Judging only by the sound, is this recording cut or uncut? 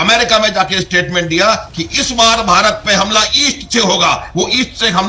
uncut